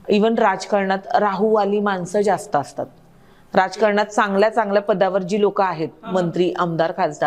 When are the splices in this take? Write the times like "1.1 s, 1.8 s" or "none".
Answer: none